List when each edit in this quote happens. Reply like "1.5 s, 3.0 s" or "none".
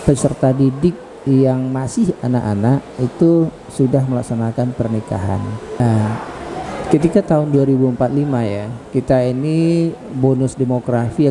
5.8 s

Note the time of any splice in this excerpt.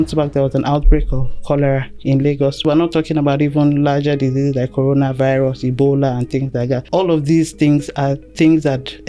2.6 s, 6.9 s

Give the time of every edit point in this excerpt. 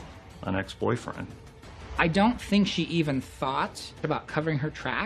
1.5 s, 4.0 s

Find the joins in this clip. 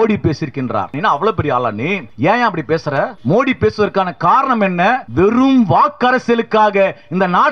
0.9 s, 2.1 s, 3.2 s, 5.1 s

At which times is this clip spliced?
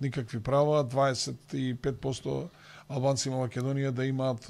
none

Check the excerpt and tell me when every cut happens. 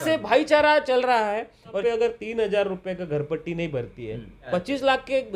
1.8 s, 4.3 s

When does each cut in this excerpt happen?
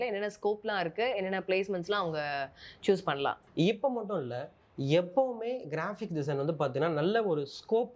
3.4 s

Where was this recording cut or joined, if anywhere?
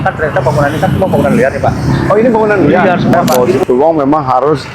3.6 s

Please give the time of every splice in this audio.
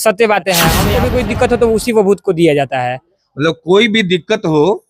0.9 s

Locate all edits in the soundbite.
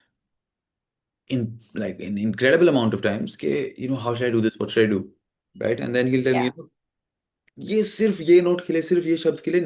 none

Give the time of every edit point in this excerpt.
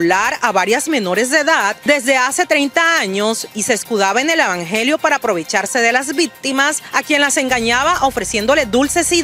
1.8 s, 6.8 s

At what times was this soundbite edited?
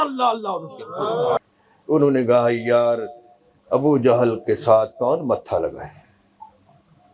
1.4 s

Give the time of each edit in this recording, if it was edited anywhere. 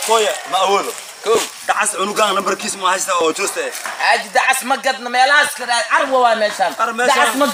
none

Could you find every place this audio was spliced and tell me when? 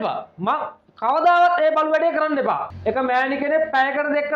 2.7 s

